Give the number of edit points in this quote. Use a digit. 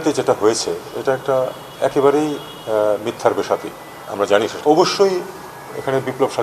1